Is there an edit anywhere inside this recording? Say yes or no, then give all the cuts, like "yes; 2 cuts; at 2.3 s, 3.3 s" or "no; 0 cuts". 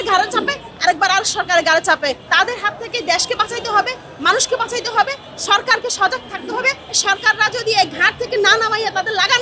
yes; 2 cuts; at 2.2 s, 7.0 s